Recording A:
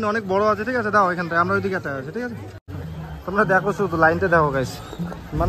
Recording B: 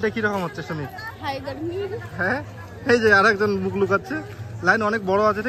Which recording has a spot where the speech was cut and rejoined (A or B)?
A